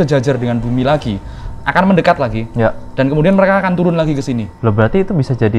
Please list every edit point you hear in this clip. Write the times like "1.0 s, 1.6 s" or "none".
4.5 s